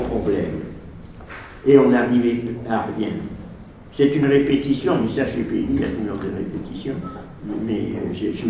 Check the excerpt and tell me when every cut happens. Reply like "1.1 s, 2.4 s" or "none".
3.9 s